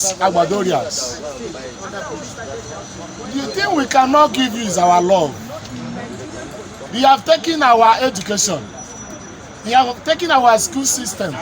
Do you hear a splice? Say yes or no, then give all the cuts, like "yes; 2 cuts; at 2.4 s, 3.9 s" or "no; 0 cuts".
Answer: yes; 1 cut; at 6.8 s